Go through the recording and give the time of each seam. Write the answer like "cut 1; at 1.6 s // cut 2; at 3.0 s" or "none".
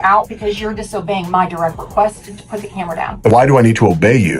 cut 1; at 3.3 s

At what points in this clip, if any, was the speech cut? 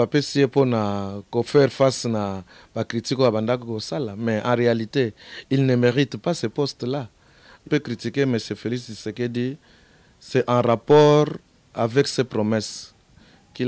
cut 1; at 7.7 s

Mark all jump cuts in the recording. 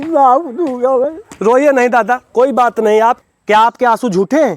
cut 1; at 3.2 s

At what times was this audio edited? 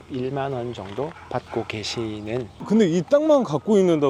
cut 1; at 2.6 s

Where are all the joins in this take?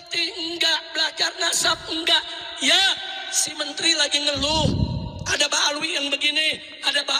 none

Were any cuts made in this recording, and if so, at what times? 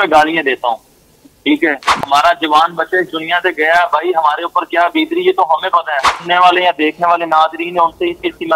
cut 1; at 2.0 s // cut 2; at 6.1 s

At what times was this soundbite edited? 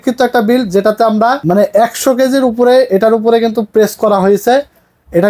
cut 1; at 1.4 s

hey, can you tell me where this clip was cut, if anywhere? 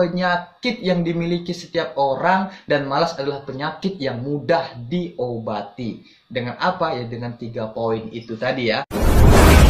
cut 1; at 8.6 s

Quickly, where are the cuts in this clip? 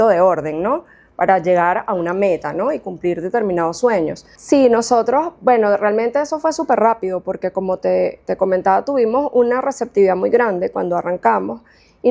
cut 1; at 4.3 s

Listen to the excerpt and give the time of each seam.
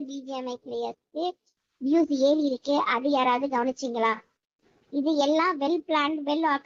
none

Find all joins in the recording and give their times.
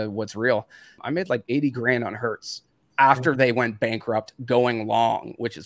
cut 1; at 1.0 s

